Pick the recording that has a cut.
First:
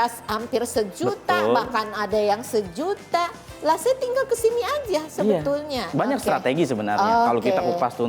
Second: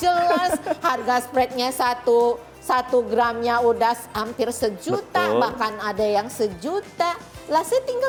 first; 1 cut; at 5.9 s

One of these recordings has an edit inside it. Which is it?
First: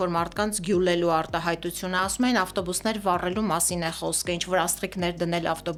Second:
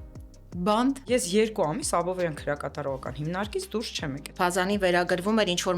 second; 2 cuts; at 1.0 s, 4.3 s

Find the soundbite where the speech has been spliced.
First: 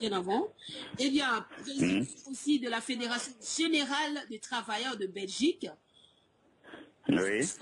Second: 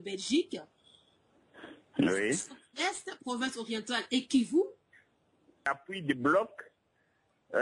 second; 1 cut; at 5.8 s

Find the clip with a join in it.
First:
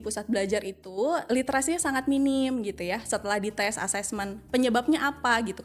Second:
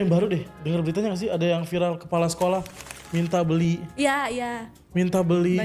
first; 1 cut; at 1.2 s

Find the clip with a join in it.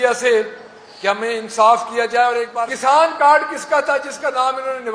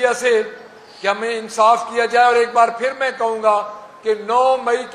first; 1 cut; at 2.5 s

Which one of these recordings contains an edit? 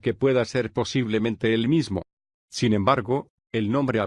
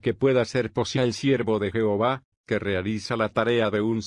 first; 1 cut; at 1.0 s

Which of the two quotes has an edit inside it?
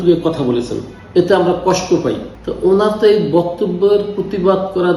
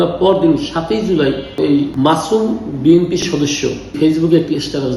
first; 1 cut; at 2.2 s

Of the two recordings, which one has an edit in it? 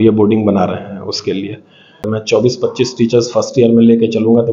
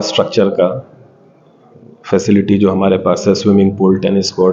first; 1 cut; at 2.1 s

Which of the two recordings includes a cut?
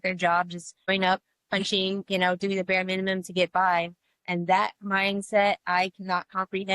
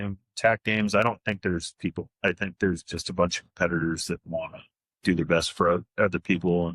first; 1 cut; at 0.9 s

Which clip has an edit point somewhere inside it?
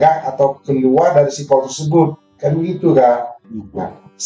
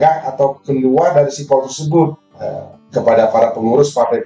second; 1 cut; at 2.2 s

